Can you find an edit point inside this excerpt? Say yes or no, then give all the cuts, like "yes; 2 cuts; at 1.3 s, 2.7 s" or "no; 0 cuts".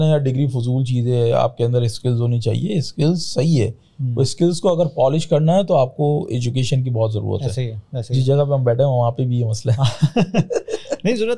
no; 0 cuts